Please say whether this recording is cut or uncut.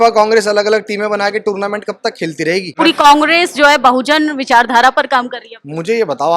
cut